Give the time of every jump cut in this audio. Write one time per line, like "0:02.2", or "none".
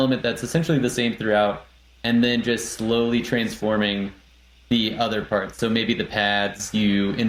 none